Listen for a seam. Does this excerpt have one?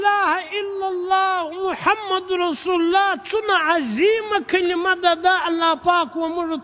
no; 0 cuts

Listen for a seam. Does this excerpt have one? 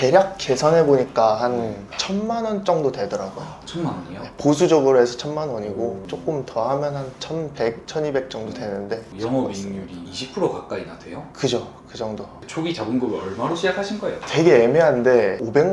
no; 0 cuts

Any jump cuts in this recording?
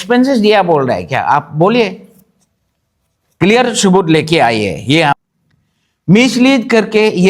yes; 1 cut; at 5.1 s

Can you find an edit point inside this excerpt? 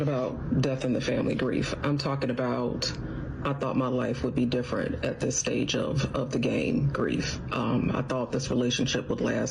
no; 0 cuts

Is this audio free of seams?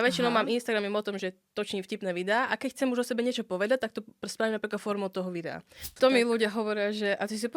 no; 1 cut; at 5.8 s

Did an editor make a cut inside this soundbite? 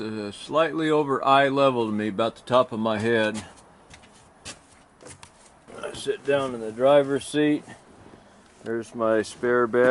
yes; 1 cut; at 5.7 s

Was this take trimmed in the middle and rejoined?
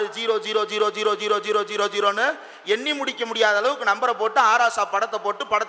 no; 0 cuts

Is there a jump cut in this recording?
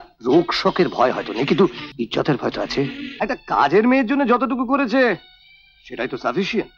yes; 2 cuts; at 1.8 s, 3.0 s

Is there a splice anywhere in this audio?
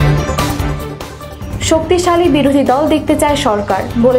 no; 0 cuts

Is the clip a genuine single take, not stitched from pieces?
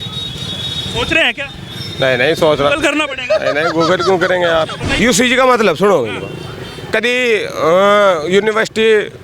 no; 1 cut; at 4.8 s

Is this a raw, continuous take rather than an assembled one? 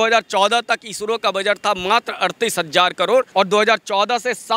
no; 1 cut; at 3.3 s

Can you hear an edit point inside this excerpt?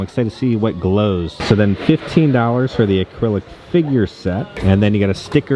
no; 0 cuts

